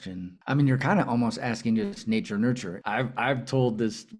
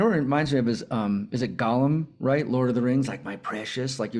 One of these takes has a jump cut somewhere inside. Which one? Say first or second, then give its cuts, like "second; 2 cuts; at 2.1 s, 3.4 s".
first; 1 cut; at 2.7 s